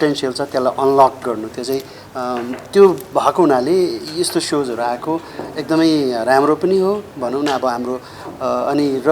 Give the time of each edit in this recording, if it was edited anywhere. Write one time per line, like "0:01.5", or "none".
none